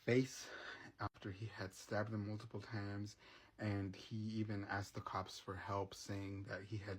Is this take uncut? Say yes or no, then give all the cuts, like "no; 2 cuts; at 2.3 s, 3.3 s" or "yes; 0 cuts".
no; 1 cut; at 1.1 s